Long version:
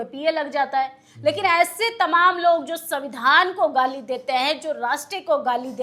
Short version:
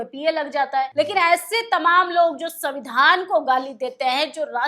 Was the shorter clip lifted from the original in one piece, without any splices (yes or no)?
no